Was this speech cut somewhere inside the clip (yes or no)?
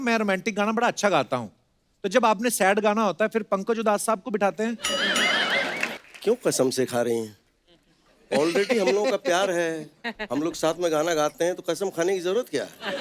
yes